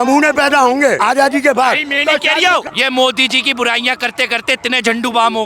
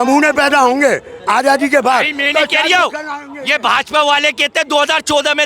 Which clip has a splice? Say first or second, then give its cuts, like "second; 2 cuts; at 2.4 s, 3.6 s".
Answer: first; 2 cuts; at 1.0 s, 2.7 s